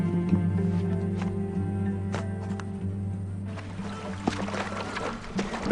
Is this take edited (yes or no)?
no